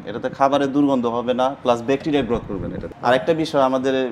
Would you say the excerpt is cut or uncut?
cut